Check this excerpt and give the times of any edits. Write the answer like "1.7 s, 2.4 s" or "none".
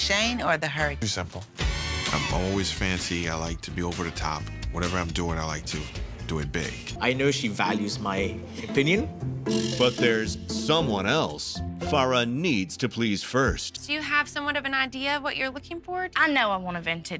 1.0 s, 6.9 s, 13.7 s